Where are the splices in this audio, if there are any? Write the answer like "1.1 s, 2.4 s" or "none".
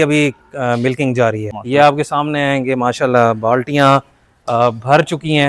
1.5 s